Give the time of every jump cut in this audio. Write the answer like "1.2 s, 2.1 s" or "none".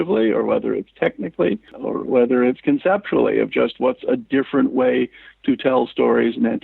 1.7 s